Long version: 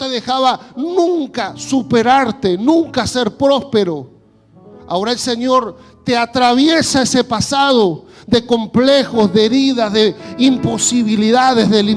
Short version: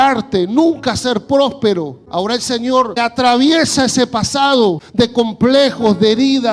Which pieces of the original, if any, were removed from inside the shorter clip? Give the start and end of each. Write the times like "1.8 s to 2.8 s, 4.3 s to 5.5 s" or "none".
4.1 s to 4.8 s, 5.8 s to 6.2 s, 8.0 s to 8.2 s